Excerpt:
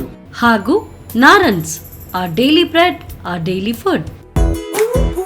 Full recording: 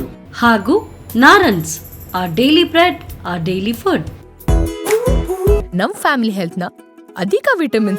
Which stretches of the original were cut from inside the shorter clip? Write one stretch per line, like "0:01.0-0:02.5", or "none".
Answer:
0:04.2-0:04.3